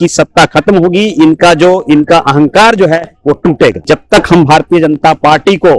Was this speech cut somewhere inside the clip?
yes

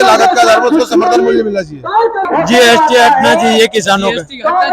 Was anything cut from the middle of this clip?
yes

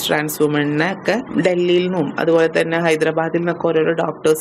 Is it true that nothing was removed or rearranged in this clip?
no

